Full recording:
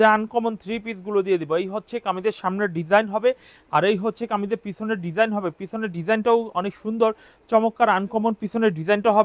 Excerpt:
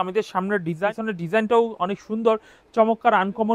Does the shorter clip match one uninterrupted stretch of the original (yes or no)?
no